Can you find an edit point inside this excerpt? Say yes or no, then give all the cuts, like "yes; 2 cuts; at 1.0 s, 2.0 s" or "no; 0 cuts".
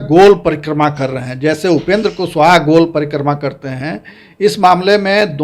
no; 0 cuts